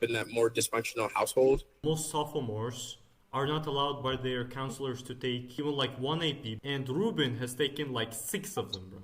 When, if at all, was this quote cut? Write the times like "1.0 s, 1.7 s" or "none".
1.7 s, 5.5 s, 6.5 s